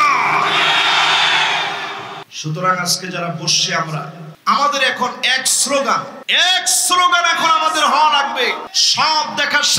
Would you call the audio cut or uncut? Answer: cut